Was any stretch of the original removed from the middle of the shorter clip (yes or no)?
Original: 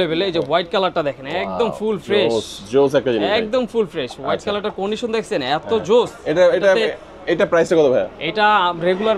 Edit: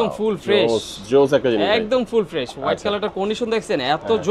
no